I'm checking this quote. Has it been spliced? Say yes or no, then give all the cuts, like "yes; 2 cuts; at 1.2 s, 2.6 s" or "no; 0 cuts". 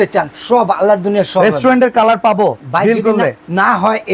no; 0 cuts